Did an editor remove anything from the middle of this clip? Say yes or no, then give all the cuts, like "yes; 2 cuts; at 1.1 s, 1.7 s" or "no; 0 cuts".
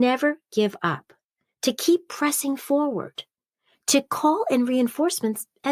no; 0 cuts